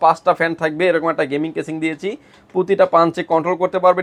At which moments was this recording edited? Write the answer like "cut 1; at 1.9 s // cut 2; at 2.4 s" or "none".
none